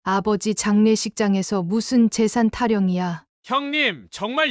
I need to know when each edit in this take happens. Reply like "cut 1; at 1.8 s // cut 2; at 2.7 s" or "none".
cut 1; at 3.3 s

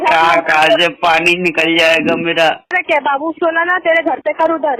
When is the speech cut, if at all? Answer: cut 1; at 2.8 s

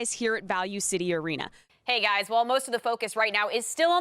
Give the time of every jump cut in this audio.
cut 1; at 1.6 s

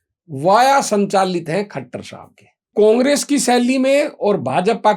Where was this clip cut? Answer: cut 1; at 2.7 s

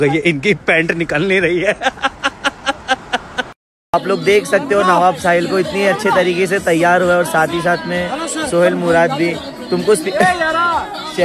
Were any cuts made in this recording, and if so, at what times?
cut 1; at 3.6 s

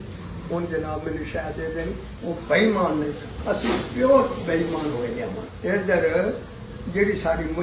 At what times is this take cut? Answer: cut 1; at 2.1 s

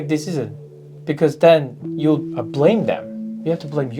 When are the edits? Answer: cut 1; at 2.4 s

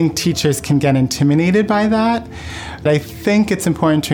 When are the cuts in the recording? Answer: cut 1; at 2.8 s

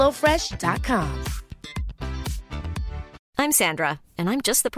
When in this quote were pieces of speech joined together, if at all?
cut 1; at 3.2 s

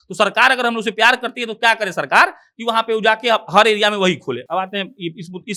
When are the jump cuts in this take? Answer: none

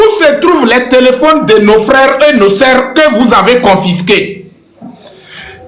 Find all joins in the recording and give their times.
none

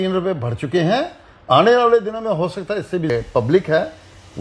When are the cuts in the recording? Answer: cut 1; at 3.1 s

